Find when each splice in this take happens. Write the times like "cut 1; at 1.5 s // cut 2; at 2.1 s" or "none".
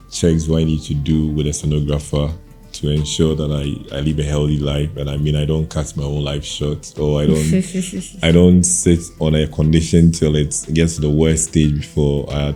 none